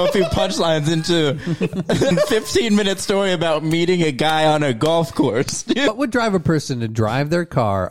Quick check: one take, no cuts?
no; 2 cuts; at 2.1 s, 5.9 s

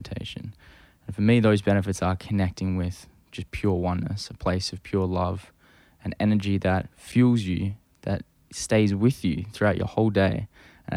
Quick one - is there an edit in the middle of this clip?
yes; 1 cut; at 7.0 s

